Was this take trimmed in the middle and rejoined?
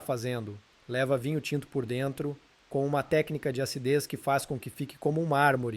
yes; 1 cut; at 2.5 s

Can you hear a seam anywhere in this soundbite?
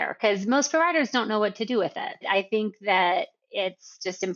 no; 0 cuts

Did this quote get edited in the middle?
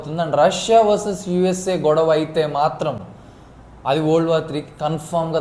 no; 0 cuts

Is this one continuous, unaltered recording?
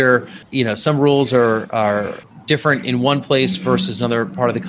yes; 0 cuts

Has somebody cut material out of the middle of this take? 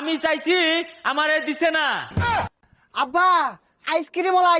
yes; 1 cut; at 2.3 s

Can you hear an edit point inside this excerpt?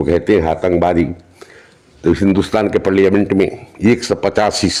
no; 0 cuts

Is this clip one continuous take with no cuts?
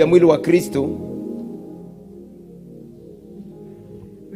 no; 1 cut; at 1.7 s

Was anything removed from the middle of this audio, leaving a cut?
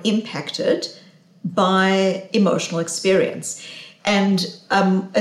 no; 0 cuts

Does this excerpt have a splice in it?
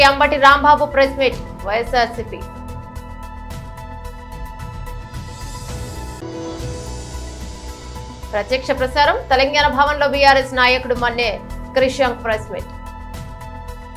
no; 0 cuts

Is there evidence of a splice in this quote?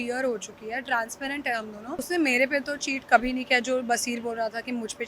yes; 1 cut; at 2.0 s

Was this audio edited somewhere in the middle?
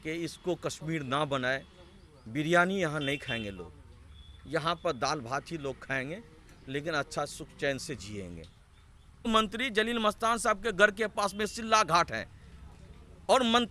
yes; 1 cut; at 9.3 s

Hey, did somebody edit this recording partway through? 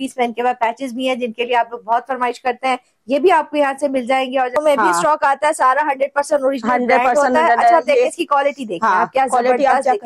yes; 1 cut; at 4.6 s

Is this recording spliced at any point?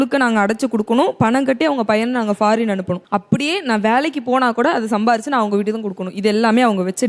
no; 0 cuts

